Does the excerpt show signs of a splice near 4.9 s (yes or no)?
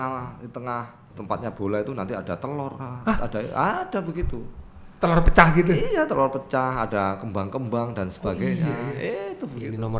no